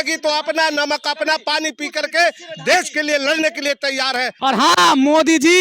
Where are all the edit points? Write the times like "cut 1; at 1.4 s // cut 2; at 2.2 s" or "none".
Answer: cut 1; at 4.3 s